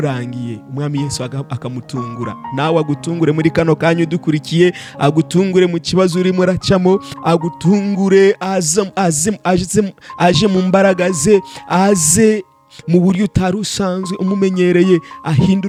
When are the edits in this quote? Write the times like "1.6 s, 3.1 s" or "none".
none